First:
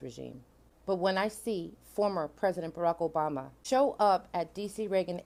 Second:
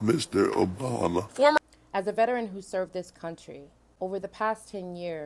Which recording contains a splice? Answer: second; 1 cut; at 1.6 s

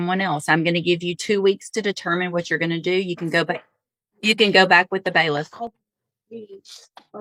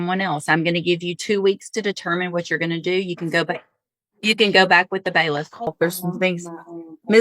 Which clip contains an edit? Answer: second; 1 cut; at 5.7 s

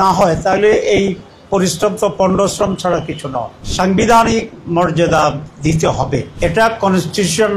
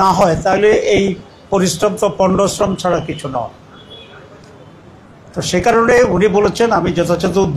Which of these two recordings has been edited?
first; 2 cuts; at 3.6 s, 6.3 s

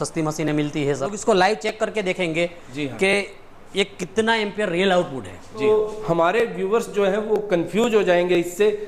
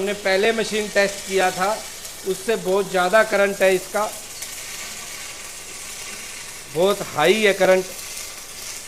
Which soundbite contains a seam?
first; 2 cuts; at 1.2 s, 5.7 s

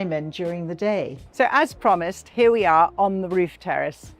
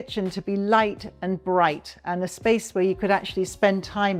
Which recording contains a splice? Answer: first; 1 cut; at 1.2 s

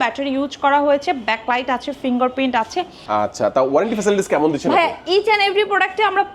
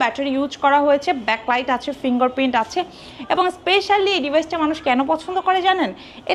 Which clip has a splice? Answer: first; 1 cut; at 3.0 s

